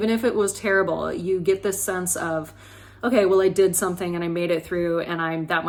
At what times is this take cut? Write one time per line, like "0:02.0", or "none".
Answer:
none